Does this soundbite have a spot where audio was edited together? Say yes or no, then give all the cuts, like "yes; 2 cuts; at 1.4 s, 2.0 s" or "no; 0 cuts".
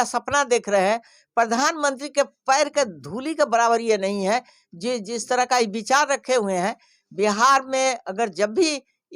no; 0 cuts